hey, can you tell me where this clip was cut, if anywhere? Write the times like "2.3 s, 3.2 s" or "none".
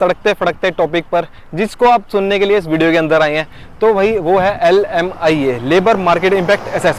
none